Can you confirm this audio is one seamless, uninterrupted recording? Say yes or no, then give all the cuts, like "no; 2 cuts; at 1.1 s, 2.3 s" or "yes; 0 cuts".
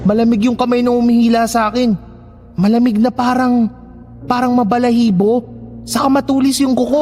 yes; 0 cuts